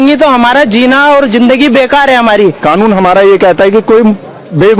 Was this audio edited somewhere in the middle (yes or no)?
yes